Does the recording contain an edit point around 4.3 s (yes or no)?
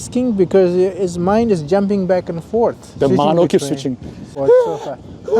yes